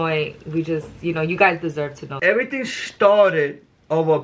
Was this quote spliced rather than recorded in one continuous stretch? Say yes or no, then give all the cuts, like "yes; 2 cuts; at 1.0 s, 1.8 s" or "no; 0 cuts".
yes; 1 cut; at 2.1 s